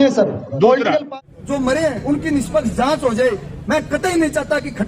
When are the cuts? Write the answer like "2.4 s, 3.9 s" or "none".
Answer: 1.0 s